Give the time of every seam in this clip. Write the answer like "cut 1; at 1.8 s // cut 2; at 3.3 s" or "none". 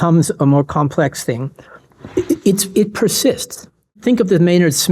cut 1; at 3.9 s